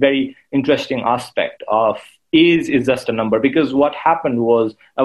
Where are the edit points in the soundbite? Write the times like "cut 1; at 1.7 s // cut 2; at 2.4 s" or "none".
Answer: none